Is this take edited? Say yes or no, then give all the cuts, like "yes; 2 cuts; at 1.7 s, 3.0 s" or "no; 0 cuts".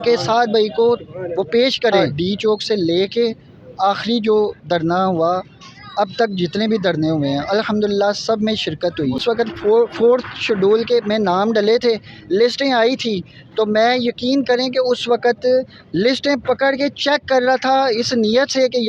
yes; 2 cuts; at 2.1 s, 9.2 s